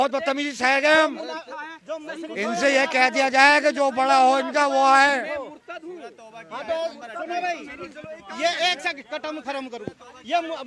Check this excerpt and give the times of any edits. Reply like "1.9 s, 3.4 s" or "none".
none